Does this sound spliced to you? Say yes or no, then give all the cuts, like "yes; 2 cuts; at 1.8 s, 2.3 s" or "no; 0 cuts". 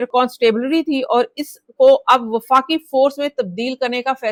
no; 0 cuts